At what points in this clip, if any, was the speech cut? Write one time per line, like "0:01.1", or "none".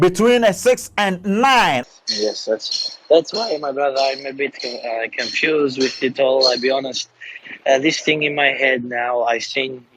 0:01.8